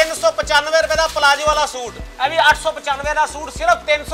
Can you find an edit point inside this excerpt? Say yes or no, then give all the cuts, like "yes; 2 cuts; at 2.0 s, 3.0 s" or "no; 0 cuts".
yes; 1 cut; at 1.9 s